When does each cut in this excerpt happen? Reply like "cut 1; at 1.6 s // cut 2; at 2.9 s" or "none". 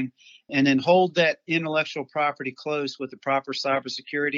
none